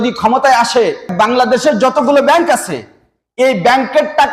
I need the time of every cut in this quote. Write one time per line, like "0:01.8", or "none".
0:01.1